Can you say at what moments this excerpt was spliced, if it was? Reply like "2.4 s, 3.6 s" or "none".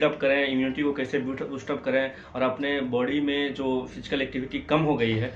none